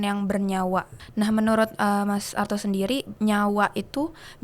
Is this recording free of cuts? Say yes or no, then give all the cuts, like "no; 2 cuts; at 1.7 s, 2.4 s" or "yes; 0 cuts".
no; 2 cuts; at 1.0 s, 3.1 s